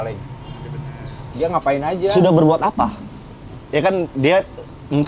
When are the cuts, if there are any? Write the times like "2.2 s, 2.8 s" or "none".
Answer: 1.2 s

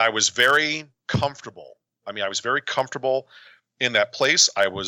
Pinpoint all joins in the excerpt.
0.9 s, 2.0 s

